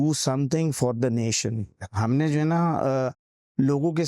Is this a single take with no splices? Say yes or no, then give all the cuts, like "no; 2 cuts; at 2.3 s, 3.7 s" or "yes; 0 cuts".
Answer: no; 1 cut; at 1.9 s